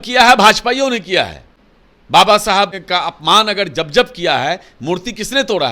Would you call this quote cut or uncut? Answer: cut